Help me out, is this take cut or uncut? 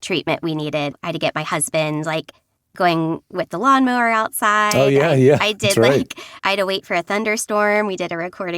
cut